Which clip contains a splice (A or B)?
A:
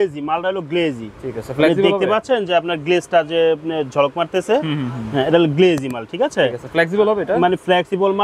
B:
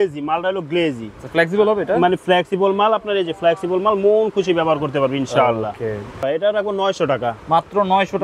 B